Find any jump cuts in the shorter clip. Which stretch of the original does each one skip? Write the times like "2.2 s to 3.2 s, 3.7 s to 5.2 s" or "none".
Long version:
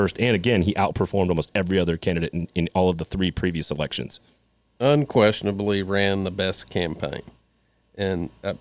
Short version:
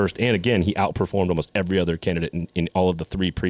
none

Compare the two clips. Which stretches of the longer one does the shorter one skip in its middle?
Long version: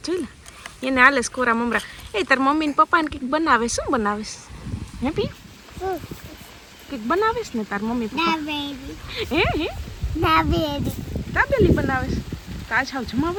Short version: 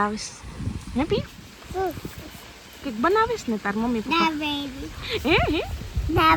none

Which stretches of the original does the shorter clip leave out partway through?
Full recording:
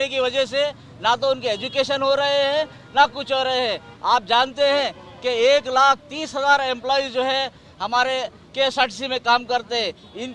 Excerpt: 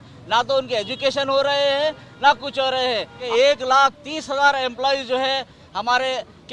3.9 s to 5.2 s

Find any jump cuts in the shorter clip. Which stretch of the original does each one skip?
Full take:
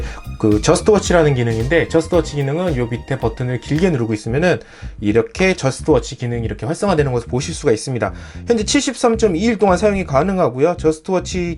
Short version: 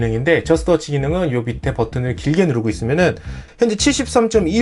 4.8 s to 8.3 s

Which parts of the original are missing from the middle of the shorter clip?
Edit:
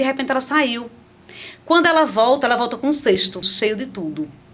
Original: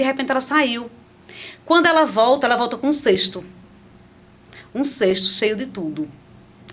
3.5 s to 5.3 s

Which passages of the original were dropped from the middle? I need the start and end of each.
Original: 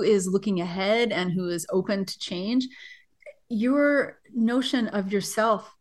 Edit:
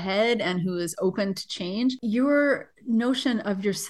2.7 s to 3.5 s

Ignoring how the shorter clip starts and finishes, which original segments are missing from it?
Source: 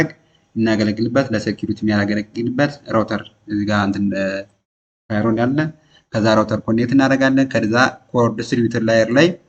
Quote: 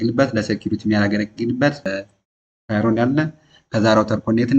2.9 s to 4.3 s

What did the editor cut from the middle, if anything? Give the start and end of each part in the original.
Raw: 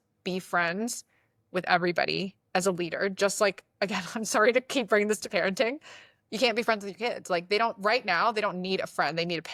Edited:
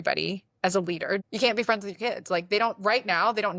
3.1 s to 6.2 s

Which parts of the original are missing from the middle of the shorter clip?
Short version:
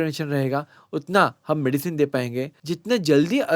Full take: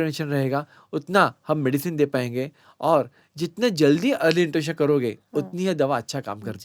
2.6 s to 3.3 s

